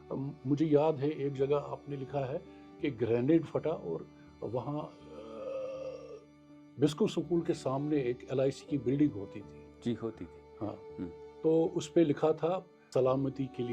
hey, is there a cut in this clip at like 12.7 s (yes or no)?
yes